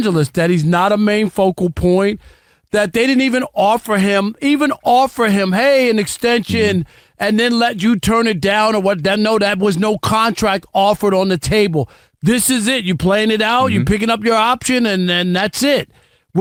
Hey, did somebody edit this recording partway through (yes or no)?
no